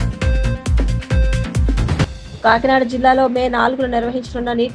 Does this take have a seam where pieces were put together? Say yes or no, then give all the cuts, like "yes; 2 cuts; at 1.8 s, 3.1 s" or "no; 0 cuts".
yes; 1 cut; at 1.7 s